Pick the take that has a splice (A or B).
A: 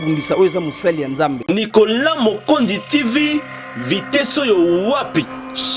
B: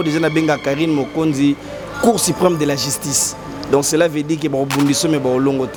A